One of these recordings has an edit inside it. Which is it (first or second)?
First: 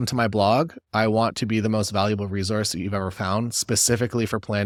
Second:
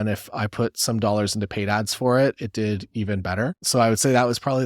second